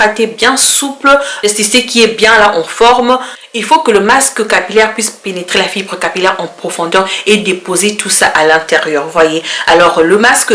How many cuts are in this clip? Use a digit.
0